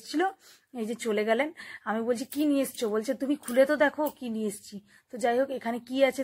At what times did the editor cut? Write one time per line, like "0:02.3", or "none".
none